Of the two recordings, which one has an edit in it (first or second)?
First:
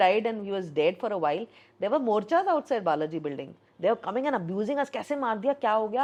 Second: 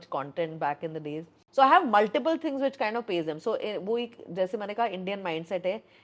second